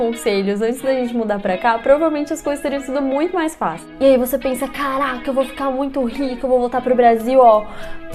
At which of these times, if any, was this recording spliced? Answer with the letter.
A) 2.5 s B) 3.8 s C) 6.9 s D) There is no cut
B